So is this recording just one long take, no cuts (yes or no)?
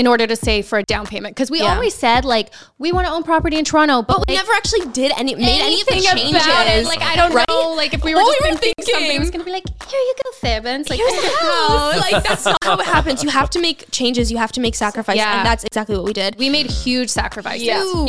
yes